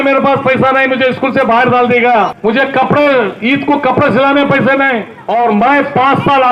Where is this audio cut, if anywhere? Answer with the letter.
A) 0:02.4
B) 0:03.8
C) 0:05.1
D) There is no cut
C